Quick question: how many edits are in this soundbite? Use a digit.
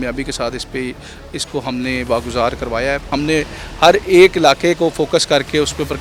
1